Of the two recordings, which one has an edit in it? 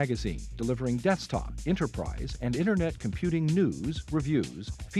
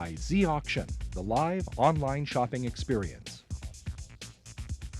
second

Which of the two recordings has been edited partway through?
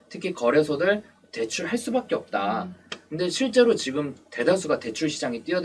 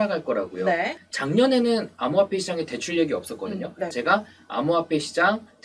second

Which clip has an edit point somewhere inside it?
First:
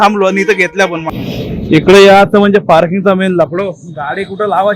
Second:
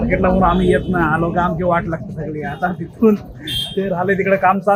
first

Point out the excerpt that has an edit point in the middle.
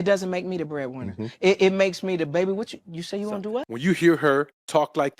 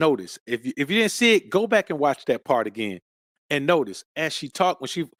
first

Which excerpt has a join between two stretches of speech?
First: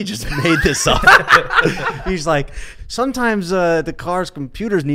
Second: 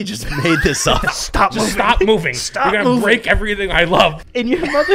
second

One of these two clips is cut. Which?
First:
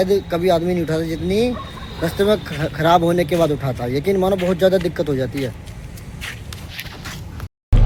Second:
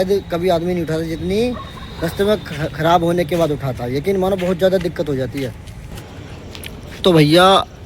second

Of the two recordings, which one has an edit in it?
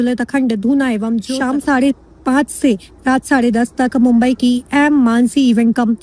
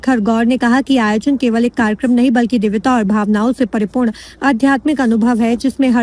first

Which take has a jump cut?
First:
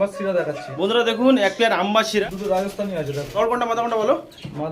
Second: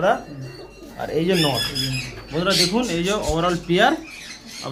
first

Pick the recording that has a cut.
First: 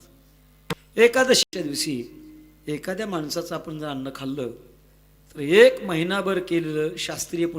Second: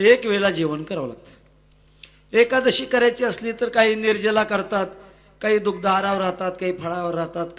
first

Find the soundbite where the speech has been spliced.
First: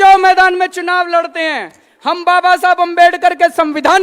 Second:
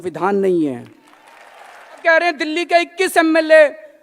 second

